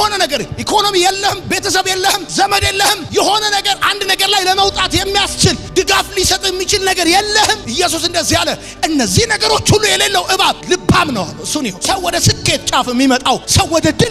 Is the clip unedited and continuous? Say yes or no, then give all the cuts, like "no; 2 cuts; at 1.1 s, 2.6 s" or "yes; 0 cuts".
no; 1 cut; at 11.8 s